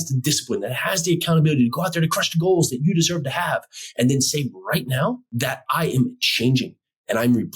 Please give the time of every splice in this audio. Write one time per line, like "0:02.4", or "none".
0:05.3